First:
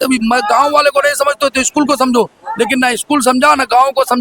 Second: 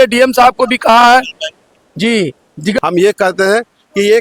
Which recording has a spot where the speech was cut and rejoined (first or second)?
second